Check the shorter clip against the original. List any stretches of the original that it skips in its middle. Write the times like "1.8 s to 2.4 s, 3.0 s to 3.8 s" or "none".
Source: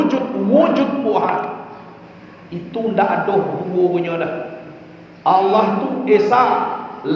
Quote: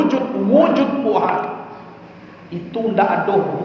none